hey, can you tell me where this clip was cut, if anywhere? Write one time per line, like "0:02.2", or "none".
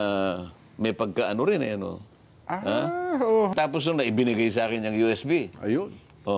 0:03.5

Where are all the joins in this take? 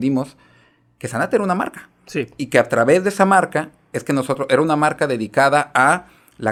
none

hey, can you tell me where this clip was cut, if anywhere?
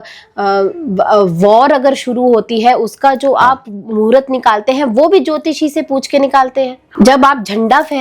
0:06.8

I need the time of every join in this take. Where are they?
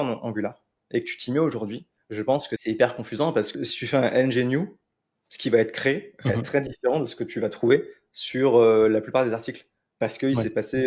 0:02.5
0:03.5

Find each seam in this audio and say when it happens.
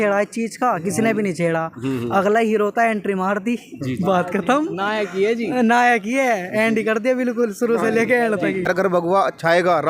0:08.7

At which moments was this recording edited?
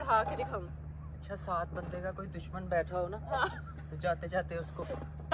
none

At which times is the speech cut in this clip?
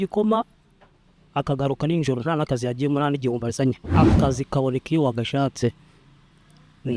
0:03.9

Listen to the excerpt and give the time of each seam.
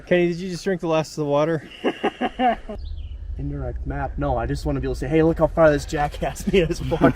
0:02.6

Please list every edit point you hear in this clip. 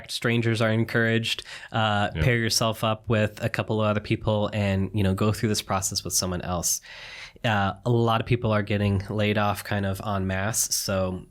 none

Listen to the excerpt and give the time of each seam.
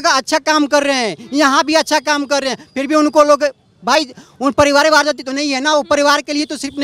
none

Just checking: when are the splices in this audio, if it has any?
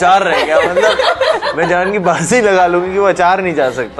none

